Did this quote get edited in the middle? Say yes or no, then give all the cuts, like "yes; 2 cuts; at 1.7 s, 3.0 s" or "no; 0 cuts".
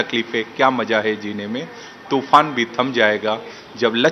no; 0 cuts